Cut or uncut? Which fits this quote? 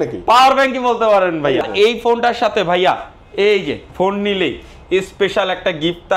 cut